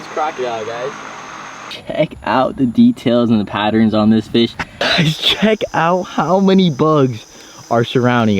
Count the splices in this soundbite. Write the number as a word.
two